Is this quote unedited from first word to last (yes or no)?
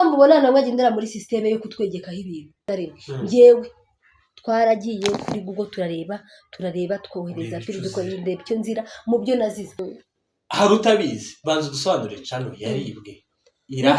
no